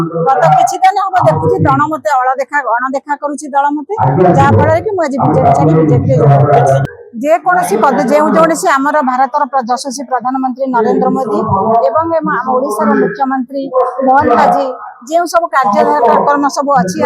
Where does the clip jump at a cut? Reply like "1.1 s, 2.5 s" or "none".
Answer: 6.8 s